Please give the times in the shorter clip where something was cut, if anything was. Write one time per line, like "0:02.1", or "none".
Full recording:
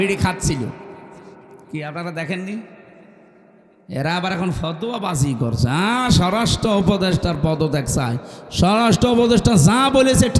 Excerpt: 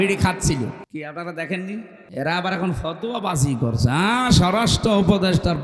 0:00.8
0:02.0